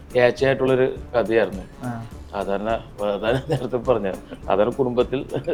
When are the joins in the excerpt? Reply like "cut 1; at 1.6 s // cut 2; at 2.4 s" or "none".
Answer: none